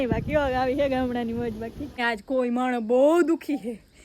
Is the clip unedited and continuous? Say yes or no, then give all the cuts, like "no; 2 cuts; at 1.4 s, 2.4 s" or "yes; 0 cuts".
no; 1 cut; at 2.0 s